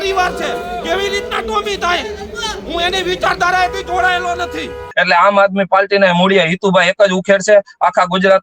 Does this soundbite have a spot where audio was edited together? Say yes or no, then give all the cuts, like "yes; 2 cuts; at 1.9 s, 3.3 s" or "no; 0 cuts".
yes; 1 cut; at 4.9 s